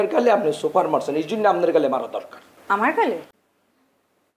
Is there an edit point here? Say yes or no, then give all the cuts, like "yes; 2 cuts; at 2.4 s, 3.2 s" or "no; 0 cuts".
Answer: yes; 1 cut; at 3.3 s